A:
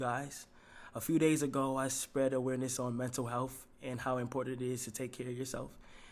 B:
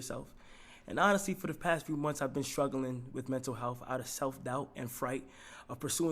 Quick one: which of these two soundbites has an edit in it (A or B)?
B